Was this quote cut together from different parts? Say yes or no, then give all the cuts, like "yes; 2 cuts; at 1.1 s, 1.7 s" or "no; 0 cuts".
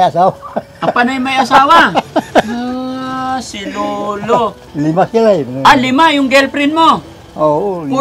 yes; 1 cut; at 4.6 s